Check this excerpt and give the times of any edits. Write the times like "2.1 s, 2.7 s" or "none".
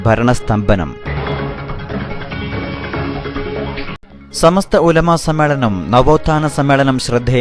1.0 s, 4.0 s